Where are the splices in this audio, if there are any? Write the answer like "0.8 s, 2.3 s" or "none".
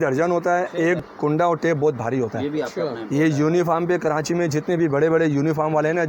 1.0 s